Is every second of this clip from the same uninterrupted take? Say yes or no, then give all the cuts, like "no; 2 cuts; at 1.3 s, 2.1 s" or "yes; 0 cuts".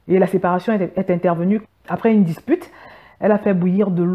no; 1 cut; at 1.6 s